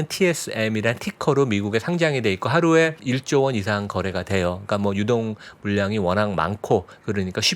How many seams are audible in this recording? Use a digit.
1